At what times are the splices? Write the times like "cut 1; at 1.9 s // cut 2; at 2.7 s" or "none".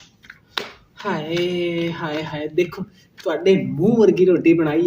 none